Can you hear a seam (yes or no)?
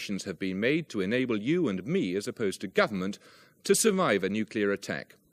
no